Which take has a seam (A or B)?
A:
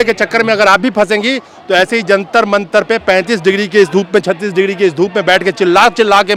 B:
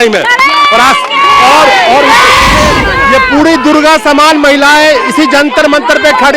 B